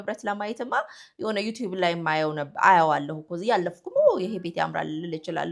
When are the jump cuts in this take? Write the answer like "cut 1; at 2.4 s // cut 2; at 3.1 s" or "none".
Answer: none

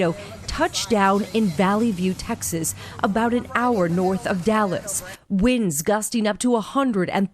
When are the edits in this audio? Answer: cut 1; at 5.1 s

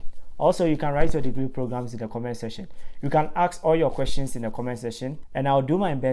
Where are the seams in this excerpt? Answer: cut 1; at 5.2 s

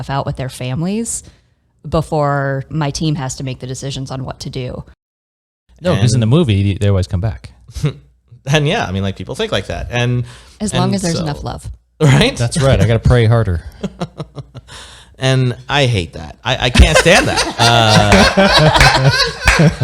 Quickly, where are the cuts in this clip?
cut 1; at 2.7 s // cut 2; at 5.2 s

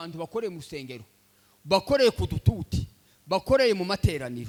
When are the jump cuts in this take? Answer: none

